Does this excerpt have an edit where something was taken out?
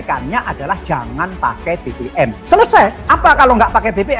yes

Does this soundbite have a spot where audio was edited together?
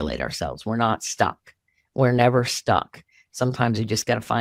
no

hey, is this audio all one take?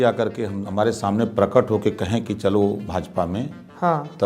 yes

